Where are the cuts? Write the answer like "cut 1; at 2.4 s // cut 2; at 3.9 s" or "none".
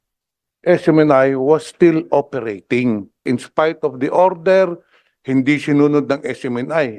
cut 1; at 3.2 s